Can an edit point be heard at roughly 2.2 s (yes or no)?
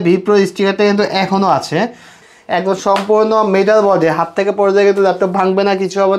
yes